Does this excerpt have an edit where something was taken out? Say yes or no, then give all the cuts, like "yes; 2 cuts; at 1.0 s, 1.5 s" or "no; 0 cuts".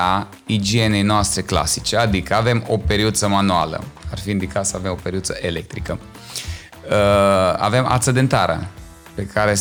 no; 0 cuts